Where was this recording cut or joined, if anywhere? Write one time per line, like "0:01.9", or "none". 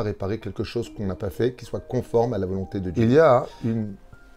0:02.9